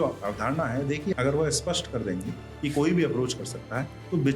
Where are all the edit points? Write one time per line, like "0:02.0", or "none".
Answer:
0:01.1